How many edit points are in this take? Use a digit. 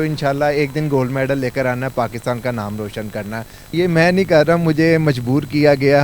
1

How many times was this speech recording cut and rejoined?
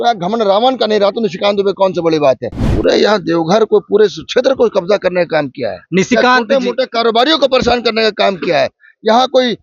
1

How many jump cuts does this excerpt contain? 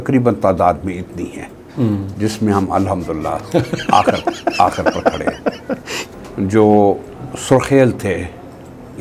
1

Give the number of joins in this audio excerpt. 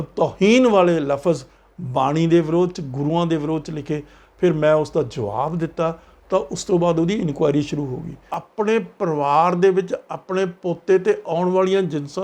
1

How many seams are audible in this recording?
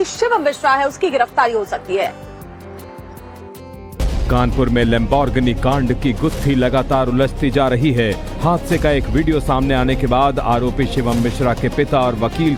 0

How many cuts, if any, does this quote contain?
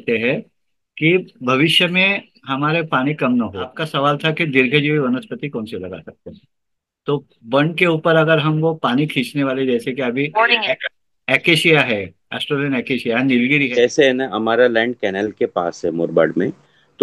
2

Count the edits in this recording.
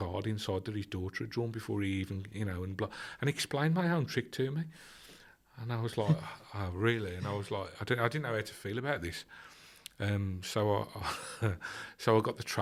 0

